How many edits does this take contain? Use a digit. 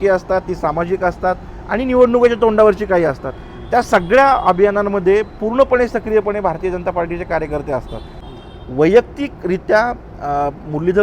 1